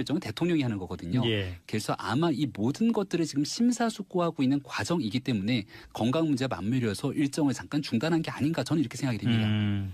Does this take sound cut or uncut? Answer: uncut